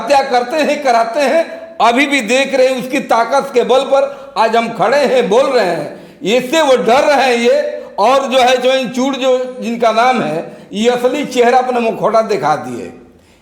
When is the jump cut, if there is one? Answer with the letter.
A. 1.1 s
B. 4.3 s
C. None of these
C